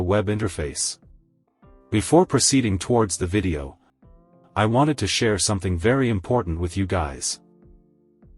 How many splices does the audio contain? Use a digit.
1